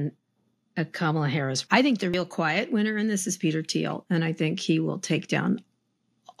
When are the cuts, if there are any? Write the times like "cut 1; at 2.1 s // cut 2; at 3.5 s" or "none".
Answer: cut 1; at 1.6 s